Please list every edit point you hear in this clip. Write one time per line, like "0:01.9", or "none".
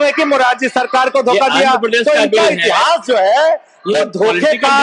none